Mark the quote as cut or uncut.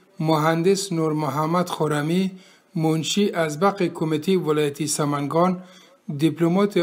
uncut